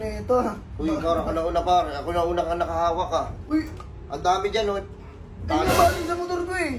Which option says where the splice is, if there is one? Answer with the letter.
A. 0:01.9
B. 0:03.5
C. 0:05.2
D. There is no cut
D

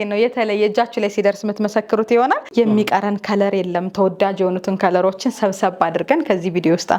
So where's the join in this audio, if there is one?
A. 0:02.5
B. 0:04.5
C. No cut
A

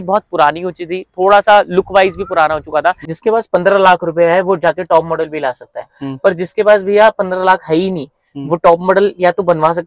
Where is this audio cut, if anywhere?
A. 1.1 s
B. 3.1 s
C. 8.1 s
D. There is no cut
B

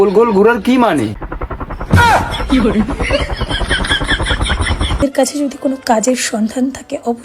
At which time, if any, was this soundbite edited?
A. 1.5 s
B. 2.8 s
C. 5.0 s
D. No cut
C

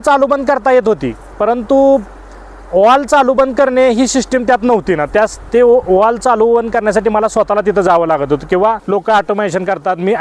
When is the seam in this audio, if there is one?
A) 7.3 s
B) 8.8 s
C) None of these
B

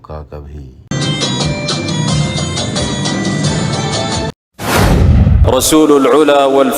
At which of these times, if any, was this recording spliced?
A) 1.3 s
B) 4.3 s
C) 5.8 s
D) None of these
B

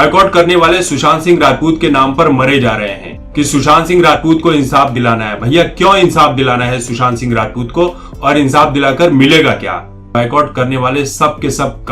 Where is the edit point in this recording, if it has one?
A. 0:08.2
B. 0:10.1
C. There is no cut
B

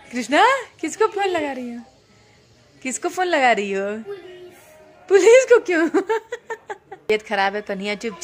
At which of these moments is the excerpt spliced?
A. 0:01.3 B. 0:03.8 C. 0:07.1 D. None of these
C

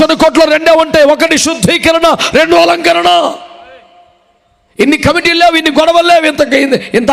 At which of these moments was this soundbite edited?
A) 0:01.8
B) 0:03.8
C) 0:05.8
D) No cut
D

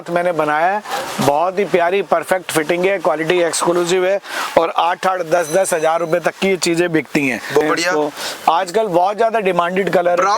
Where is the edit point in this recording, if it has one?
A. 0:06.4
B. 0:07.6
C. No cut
B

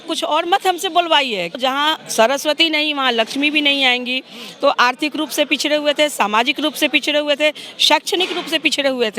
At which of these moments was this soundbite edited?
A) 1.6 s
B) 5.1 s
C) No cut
A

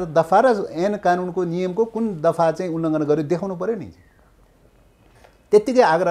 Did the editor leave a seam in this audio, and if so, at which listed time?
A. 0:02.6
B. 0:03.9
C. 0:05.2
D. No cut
D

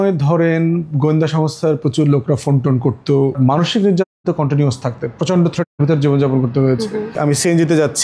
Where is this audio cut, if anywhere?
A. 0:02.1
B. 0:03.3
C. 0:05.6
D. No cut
B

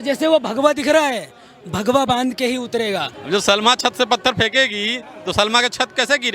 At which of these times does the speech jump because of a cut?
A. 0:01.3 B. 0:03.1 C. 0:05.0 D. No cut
B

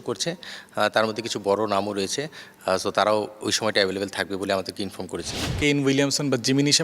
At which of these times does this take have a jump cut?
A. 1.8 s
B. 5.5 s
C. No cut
B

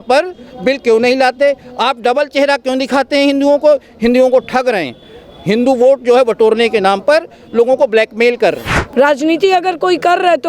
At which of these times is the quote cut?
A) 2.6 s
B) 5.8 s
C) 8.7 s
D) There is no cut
C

